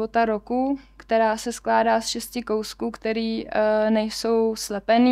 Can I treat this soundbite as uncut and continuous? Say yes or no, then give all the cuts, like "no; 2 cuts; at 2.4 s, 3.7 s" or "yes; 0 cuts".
yes; 0 cuts